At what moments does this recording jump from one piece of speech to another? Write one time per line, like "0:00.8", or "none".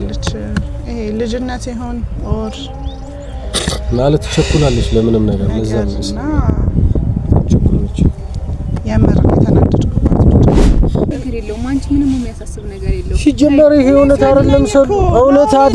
0:11.1